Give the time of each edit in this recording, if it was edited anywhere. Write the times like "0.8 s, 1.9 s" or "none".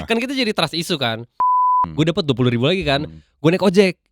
1.8 s